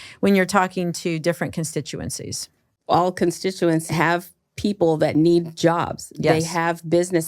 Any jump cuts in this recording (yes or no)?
yes